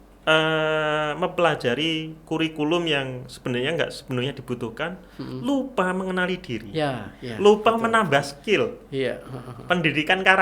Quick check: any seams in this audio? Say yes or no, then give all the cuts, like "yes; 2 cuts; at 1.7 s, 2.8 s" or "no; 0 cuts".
no; 0 cuts